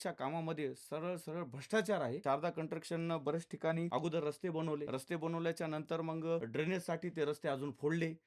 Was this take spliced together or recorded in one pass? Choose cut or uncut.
cut